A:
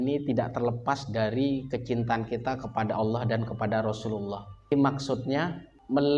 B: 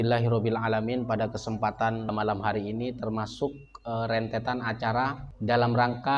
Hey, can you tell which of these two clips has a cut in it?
A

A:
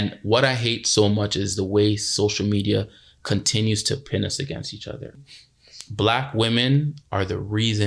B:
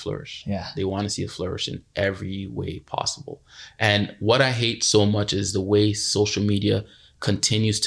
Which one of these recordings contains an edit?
A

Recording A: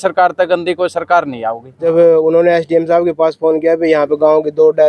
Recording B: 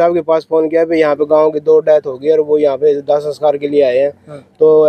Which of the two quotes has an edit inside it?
A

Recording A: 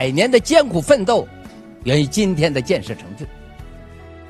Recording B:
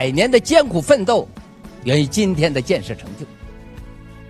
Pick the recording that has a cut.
A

